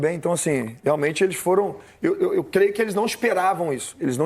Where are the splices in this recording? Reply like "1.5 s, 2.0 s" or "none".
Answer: none